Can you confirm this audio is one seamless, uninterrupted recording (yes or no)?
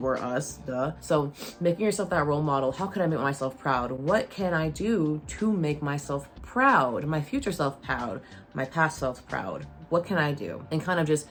yes